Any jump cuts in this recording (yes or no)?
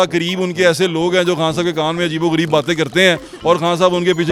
no